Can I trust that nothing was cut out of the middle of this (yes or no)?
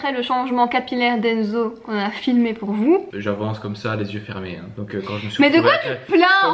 no